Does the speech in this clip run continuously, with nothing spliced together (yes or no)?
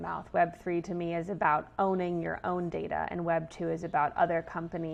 yes